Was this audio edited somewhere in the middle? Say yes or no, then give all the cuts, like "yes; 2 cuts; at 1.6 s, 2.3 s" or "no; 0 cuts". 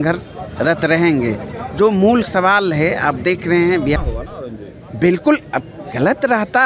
yes; 1 cut; at 4.0 s